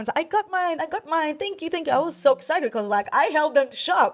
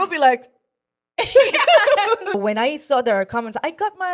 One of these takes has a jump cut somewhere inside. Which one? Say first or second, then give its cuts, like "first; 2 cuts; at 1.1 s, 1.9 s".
second; 1 cut; at 2.4 s